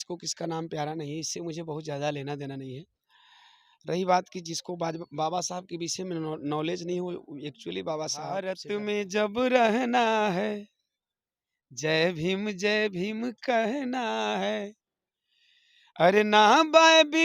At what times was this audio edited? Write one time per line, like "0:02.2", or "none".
0:08.6

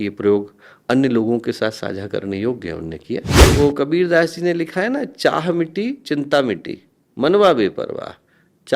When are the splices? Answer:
0:03.4

